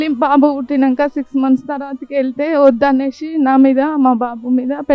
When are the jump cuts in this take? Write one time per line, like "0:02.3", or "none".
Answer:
none